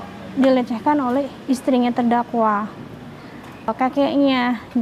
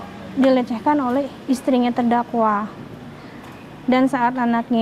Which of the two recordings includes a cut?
first; 1 cut; at 3.7 s

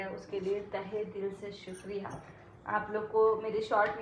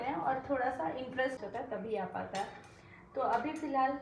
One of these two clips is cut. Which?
second; 1 cut; at 1.4 s

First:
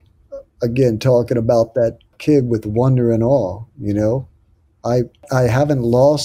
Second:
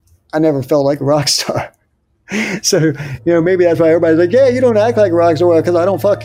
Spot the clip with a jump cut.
first; 2 cuts; at 2.1 s, 5.2 s

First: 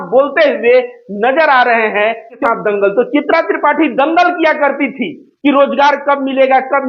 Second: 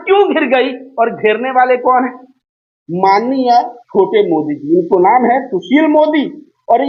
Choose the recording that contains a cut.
first; 1 cut; at 2.4 s

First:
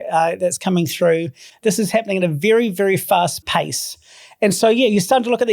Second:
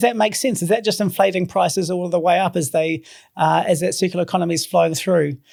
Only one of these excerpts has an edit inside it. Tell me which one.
first; 1 cut; at 3.4 s

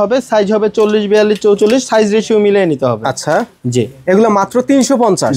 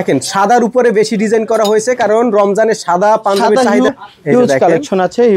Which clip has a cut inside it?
second; 1 cut; at 3.9 s

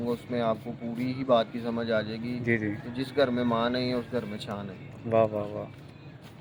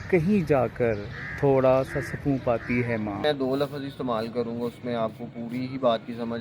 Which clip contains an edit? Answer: second; 1 cut; at 3.2 s

